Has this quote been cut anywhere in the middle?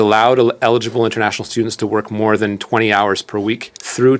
no; 0 cuts

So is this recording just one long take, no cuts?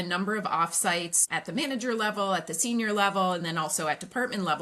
no; 1 cut; at 1.2 s

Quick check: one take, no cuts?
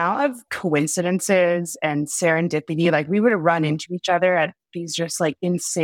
yes; 0 cuts

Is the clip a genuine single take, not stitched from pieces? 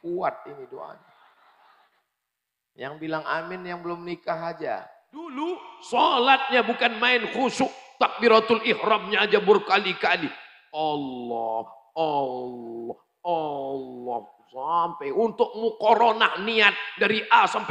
no; 1 cut; at 5.3 s

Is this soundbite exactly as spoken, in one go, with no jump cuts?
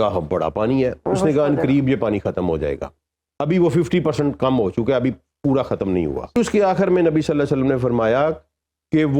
no; 1 cut; at 6.3 s

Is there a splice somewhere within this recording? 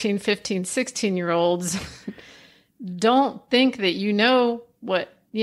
no; 0 cuts

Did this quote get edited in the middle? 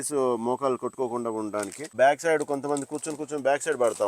yes; 1 cut; at 1.9 s

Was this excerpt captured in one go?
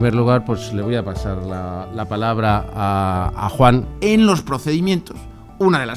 yes; 0 cuts

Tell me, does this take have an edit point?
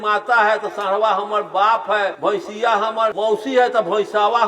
yes; 2 cuts; at 2.2 s, 3.2 s

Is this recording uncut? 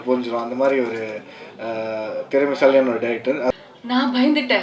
no; 1 cut; at 3.5 s

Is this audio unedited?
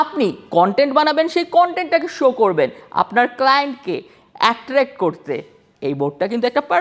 yes; 0 cuts

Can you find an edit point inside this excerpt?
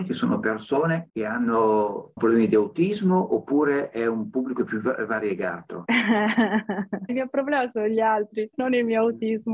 yes; 5 cuts; at 1.1 s, 2.2 s, 5.7 s, 7.1 s, 8.5 s

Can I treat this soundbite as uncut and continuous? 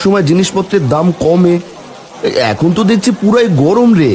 yes; 0 cuts

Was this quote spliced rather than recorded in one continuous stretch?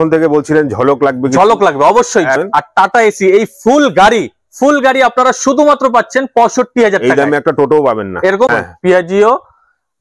yes; 2 cuts; at 2.4 s, 8.2 s

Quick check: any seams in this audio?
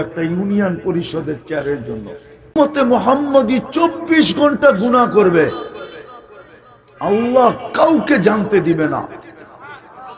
yes; 1 cut; at 2.6 s

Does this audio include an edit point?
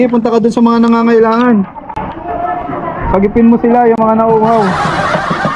no; 0 cuts

